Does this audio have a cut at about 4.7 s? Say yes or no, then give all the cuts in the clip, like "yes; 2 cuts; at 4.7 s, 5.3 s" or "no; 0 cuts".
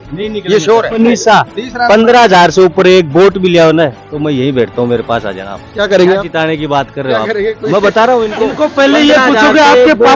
no; 1 cut; at 1.0 s